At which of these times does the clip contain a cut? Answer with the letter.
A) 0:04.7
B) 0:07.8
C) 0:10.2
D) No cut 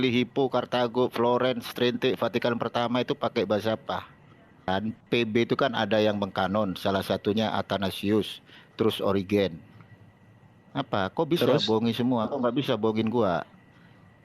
A